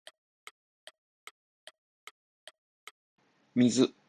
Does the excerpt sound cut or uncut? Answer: cut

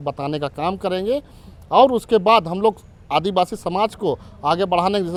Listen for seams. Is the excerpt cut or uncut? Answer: uncut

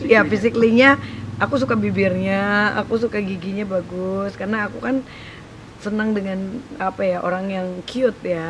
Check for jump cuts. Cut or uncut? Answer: uncut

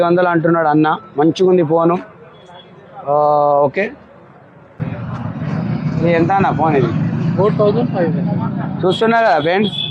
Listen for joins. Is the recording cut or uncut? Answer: cut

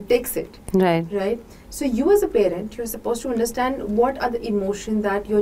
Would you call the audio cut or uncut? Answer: uncut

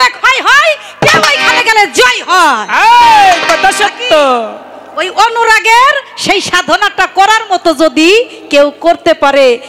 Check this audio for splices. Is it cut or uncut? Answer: uncut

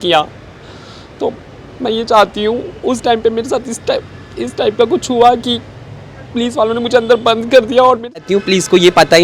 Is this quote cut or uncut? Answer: cut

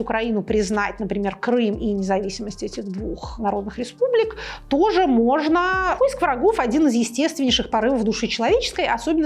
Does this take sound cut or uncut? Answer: cut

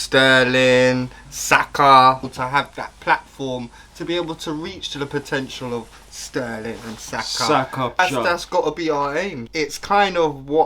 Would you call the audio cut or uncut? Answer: cut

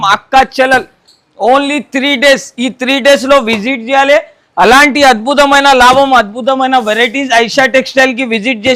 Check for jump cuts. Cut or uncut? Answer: uncut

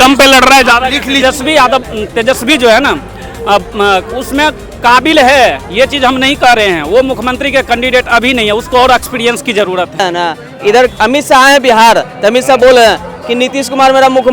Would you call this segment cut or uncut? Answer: cut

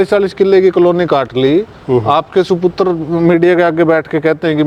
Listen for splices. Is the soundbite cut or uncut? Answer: uncut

